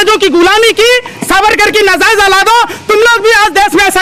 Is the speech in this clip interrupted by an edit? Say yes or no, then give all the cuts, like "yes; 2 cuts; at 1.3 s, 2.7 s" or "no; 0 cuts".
no; 0 cuts